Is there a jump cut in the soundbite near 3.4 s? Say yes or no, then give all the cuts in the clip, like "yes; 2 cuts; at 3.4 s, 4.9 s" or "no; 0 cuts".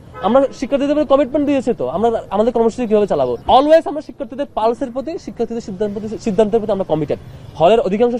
yes; 1 cut; at 3.4 s